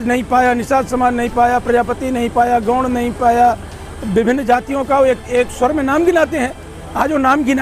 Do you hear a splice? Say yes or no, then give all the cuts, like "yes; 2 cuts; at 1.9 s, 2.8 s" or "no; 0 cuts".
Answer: no; 0 cuts